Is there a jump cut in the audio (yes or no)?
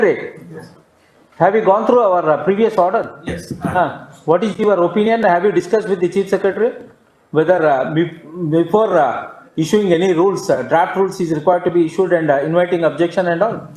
no